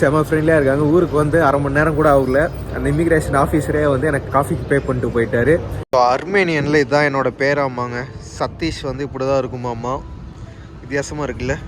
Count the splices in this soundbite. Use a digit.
1